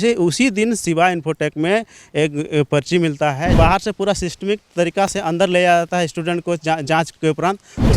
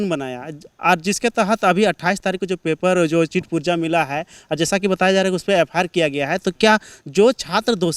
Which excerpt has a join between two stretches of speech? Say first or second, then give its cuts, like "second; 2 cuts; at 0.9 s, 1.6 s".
first; 1 cut; at 3.5 s